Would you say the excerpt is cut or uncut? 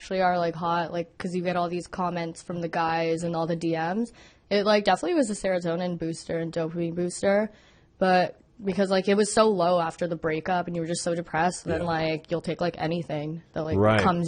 uncut